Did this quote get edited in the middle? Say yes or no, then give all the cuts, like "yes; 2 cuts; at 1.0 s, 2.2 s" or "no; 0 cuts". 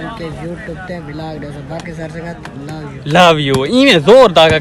no; 0 cuts